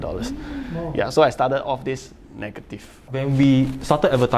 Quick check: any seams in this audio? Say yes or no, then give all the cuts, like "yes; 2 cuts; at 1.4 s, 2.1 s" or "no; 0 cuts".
yes; 1 cut; at 3.2 s